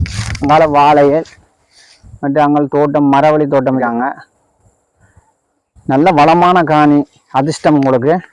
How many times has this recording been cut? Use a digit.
1